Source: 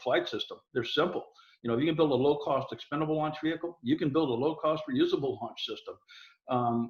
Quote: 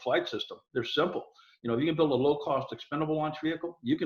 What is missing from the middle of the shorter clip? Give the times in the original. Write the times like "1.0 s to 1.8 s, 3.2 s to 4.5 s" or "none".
none